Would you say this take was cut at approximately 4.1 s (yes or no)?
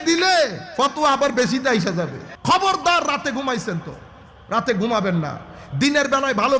no